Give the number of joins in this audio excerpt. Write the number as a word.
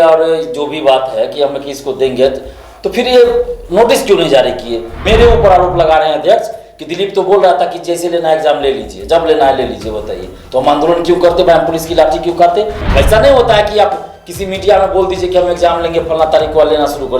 two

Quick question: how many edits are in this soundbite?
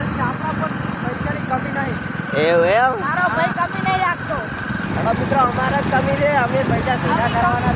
two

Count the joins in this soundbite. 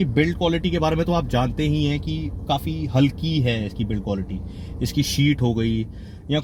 zero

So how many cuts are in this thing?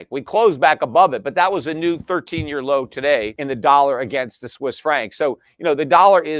one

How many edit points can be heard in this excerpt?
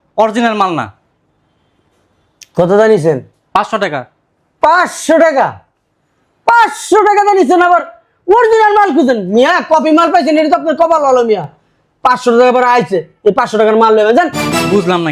zero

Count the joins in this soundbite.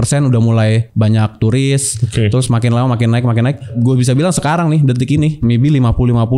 three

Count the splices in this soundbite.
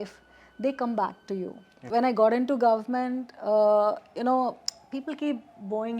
one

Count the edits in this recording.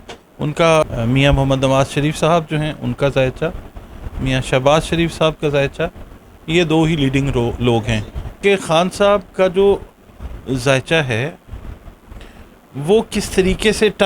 two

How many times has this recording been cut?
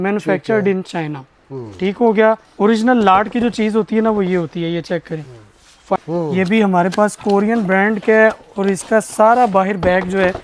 two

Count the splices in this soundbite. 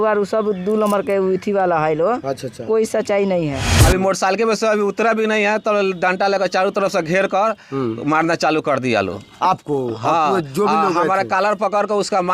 one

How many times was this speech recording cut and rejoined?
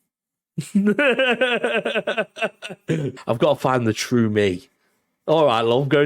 one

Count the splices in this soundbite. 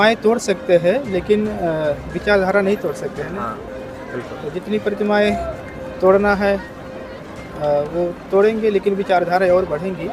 zero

